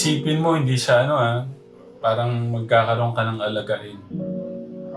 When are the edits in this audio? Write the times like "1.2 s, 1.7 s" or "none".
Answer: 3.8 s